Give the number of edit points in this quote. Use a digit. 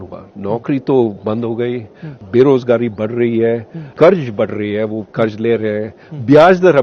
2